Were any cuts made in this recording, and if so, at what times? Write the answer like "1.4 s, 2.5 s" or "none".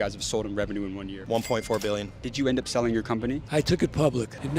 1.1 s, 2.2 s